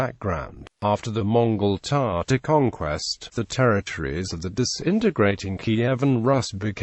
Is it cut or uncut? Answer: cut